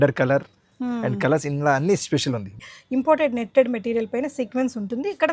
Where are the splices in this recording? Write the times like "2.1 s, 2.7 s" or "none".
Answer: 2.6 s

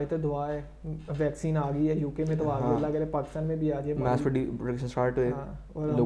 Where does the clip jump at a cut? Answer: none

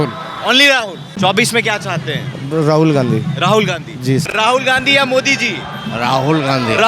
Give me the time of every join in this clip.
1.2 s, 4.3 s

